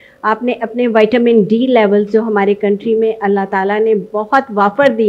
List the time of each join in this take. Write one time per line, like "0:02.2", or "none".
none